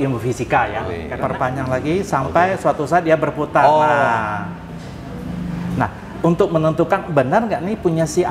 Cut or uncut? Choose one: cut